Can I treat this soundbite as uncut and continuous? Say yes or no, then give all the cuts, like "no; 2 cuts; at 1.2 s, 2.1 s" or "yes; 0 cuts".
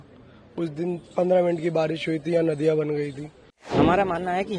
no; 1 cut; at 3.7 s